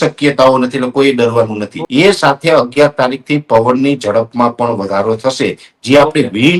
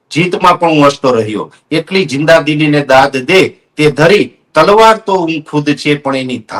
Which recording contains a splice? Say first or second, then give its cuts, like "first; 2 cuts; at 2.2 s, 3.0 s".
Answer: first; 1 cut; at 1.8 s